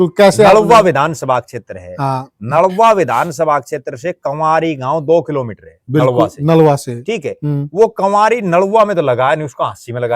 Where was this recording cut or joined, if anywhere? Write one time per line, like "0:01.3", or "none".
none